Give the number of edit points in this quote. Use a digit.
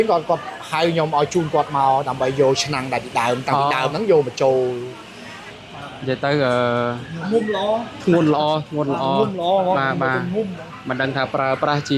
1